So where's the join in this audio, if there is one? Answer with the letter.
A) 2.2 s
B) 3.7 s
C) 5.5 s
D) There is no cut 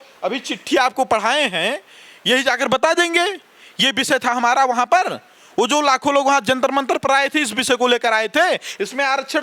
D